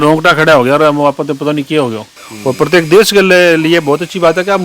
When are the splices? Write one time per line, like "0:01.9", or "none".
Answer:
0:02.1